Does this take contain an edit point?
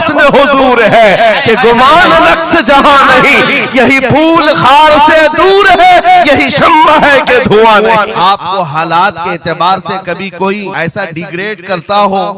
yes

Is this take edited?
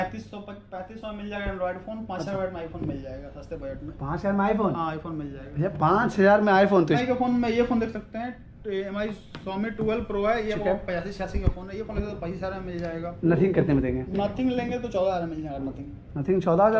yes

